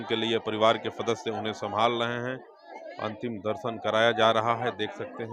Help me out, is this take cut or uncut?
uncut